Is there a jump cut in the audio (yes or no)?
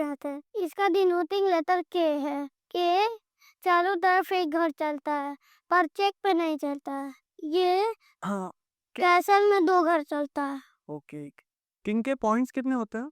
no